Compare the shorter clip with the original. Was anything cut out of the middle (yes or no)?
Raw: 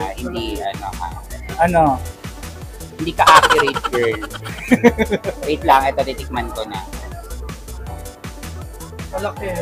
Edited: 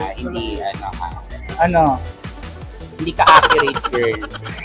no